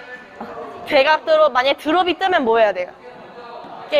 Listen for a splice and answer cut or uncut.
uncut